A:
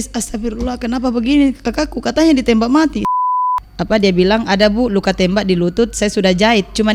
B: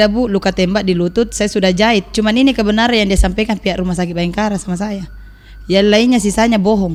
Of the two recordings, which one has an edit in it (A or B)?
A